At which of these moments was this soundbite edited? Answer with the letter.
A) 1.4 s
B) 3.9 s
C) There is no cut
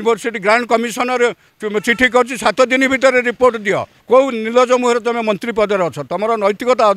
B